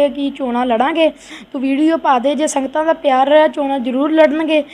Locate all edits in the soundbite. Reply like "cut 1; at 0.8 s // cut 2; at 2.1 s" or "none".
cut 1; at 1.1 s